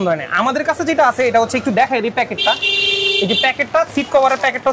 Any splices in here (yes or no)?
no